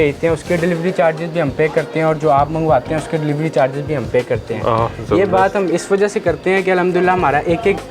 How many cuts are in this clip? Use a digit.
0